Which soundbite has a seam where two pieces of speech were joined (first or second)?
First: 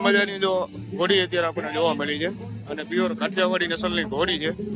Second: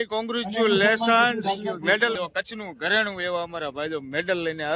second